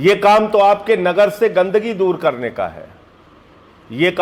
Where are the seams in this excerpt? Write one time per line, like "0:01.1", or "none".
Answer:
none